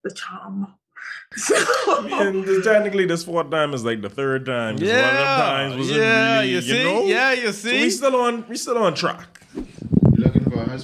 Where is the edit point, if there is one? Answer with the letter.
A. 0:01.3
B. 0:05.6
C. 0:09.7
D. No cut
C